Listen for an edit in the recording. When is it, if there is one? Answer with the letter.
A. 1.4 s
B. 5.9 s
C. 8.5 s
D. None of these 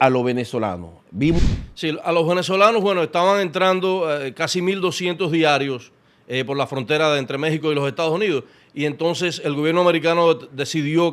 A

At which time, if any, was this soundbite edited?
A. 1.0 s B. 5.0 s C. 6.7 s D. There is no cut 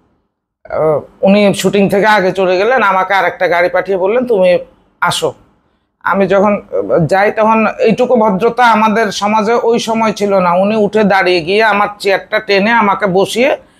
D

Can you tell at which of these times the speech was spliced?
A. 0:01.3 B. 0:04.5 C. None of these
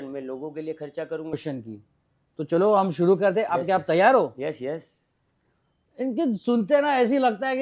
A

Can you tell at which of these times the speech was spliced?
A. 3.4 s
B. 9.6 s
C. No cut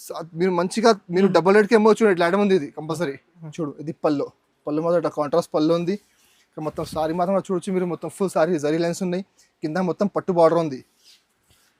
A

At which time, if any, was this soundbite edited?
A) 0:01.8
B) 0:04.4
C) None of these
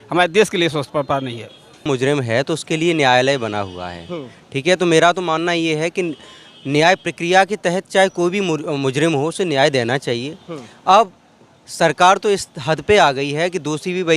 A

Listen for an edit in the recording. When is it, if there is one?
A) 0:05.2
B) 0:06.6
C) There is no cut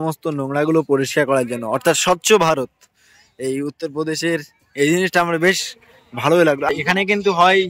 B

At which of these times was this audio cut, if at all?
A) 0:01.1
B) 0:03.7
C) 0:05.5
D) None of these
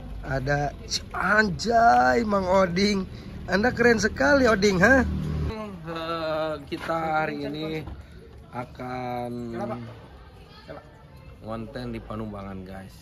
C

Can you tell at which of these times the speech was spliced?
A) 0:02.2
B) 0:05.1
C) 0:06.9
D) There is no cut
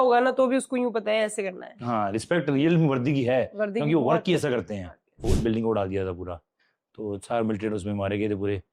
B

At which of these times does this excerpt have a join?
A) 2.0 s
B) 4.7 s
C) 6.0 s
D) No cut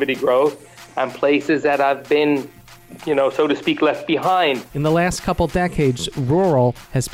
B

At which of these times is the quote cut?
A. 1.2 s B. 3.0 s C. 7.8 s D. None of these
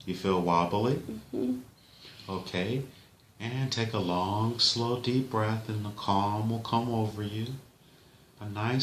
D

